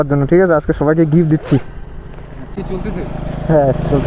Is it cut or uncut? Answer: uncut